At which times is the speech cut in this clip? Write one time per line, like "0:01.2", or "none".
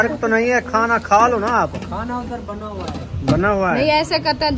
none